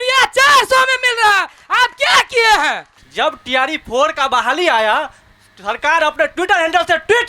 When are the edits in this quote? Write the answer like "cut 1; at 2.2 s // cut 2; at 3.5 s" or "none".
cut 1; at 2.9 s